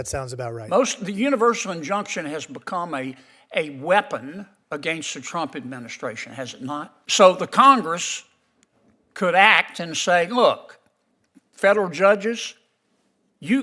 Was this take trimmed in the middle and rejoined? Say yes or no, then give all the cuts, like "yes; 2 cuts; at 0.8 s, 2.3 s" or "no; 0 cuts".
yes; 1 cut; at 7.0 s